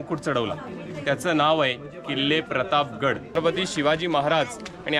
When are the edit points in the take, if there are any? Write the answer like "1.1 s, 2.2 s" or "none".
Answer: 3.4 s